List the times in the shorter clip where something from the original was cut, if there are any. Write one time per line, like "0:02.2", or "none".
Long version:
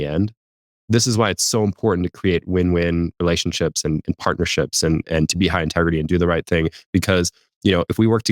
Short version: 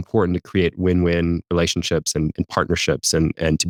none